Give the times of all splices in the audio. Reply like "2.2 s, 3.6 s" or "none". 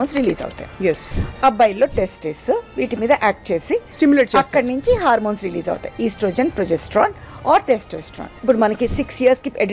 1.1 s, 8.3 s

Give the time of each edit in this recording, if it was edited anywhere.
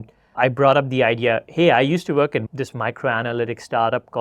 2.5 s

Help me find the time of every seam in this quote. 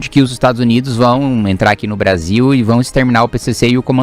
none

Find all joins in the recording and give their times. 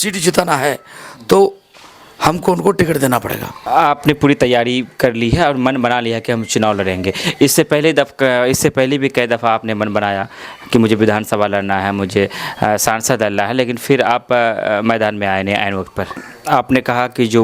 3.5 s, 16.3 s

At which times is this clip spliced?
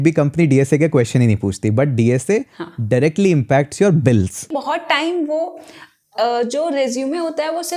4.5 s

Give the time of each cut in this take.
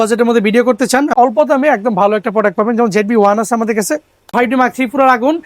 1.1 s, 4.3 s

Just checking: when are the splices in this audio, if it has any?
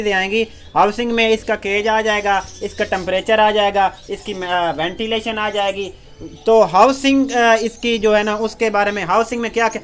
none

